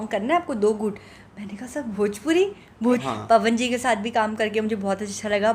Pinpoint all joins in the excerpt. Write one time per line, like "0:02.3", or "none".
0:03.1